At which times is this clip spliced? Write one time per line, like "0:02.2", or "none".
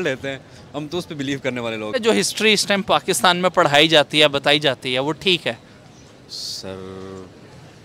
0:01.9